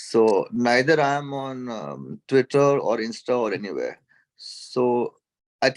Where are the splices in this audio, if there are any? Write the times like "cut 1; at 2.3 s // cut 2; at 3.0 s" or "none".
none

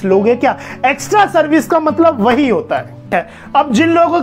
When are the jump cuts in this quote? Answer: cut 1; at 3.1 s

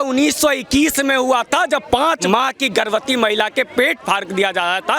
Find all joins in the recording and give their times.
cut 1; at 2.2 s

